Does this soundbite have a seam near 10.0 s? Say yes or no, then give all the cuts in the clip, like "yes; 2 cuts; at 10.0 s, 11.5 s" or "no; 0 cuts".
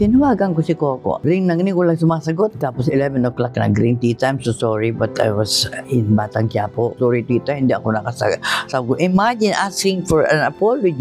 no; 2 cuts; at 1.2 s, 6.9 s